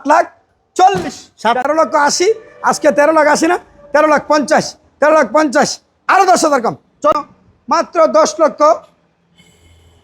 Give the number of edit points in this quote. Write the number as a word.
two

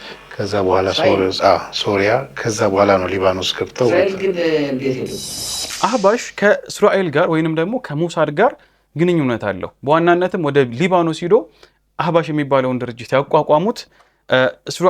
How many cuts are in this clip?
one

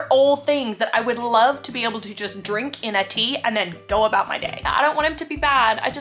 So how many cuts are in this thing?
one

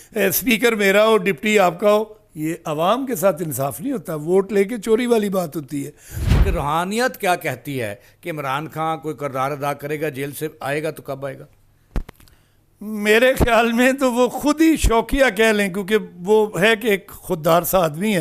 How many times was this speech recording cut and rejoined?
one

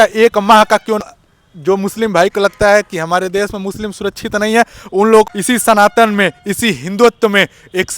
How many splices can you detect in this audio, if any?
two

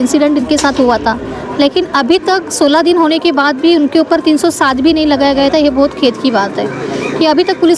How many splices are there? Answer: zero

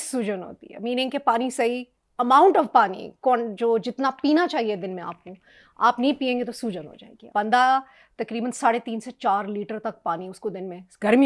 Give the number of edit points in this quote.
one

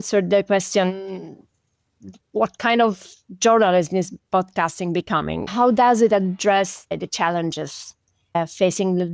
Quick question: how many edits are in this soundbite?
zero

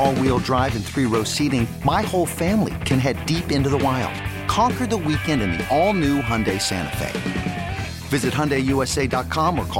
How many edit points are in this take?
zero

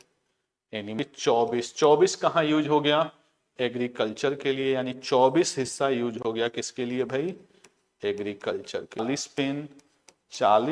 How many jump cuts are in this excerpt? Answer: two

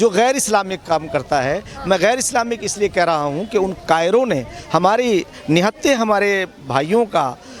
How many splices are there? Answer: zero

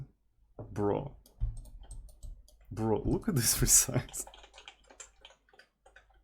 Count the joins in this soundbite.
zero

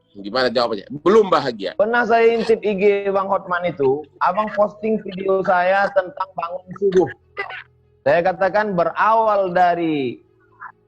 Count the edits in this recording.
one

